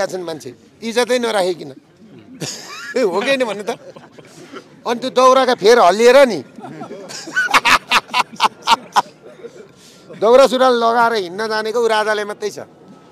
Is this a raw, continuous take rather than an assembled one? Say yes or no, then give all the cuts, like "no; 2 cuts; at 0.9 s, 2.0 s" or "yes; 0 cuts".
yes; 0 cuts